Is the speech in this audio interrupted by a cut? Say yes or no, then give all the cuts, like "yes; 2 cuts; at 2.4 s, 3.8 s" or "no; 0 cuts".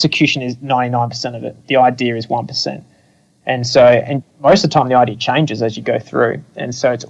no; 0 cuts